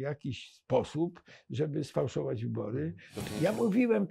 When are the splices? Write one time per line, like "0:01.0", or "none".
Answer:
0:03.1